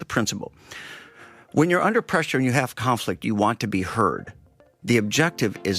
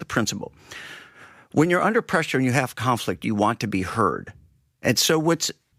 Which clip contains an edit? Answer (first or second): first